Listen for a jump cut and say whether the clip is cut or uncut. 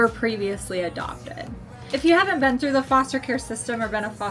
uncut